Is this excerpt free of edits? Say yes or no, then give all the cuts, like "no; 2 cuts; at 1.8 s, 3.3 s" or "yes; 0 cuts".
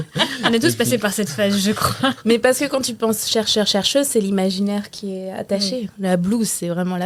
yes; 0 cuts